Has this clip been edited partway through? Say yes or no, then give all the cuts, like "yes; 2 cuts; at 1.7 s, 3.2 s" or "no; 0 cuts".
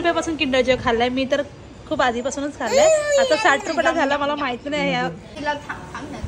yes; 1 cut; at 5.3 s